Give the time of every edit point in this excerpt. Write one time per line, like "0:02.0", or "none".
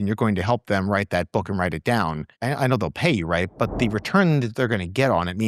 0:02.3